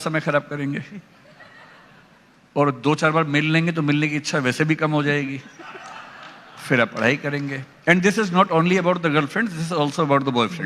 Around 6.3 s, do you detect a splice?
no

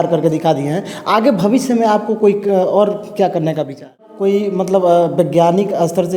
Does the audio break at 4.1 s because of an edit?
yes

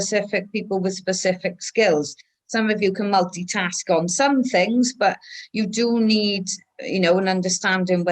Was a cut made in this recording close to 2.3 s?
no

